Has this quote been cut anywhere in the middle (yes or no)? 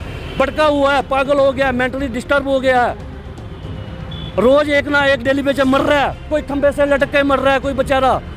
no